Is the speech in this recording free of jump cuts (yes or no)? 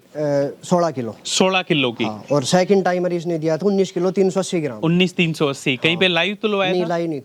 yes